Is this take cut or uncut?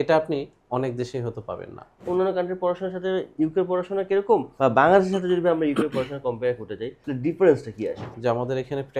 cut